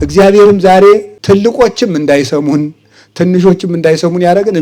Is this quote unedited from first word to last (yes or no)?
no